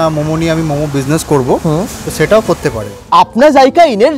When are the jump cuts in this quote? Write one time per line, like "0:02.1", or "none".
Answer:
0:03.0